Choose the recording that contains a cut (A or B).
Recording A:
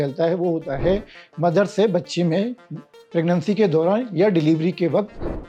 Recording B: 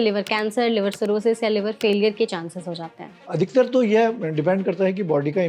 B